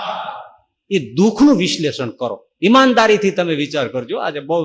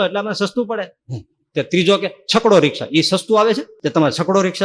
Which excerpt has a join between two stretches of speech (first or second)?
second